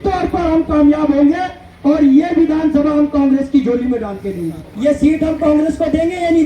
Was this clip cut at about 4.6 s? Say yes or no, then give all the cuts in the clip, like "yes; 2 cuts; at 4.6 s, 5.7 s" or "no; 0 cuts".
yes; 1 cut; at 4.6 s